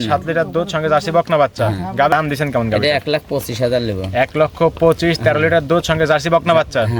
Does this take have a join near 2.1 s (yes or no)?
yes